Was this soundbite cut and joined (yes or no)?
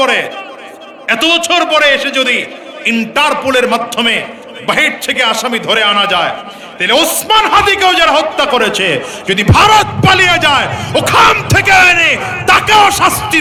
no